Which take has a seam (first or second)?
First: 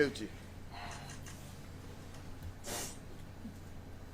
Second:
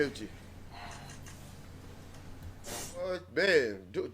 second